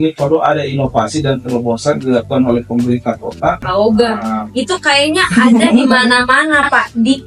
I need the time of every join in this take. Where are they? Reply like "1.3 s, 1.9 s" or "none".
3.7 s